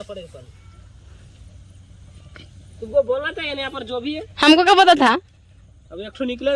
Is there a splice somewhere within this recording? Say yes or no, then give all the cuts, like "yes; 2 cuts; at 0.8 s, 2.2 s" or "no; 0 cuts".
no; 0 cuts